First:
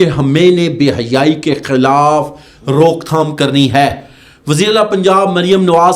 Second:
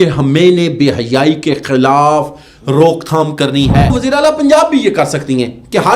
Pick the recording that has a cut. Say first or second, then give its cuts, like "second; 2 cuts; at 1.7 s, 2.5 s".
second; 1 cut; at 4.0 s